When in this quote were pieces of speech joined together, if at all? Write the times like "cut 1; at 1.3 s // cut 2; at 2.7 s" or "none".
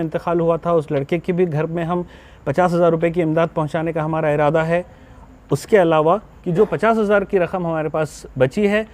cut 1; at 6.4 s